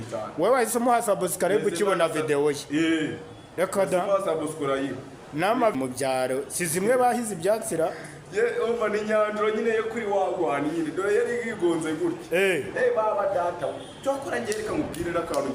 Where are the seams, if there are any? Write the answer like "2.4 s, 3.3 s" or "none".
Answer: 5.7 s